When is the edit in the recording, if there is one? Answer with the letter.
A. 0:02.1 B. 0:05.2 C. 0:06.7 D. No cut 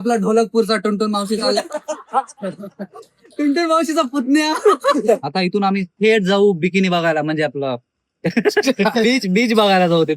B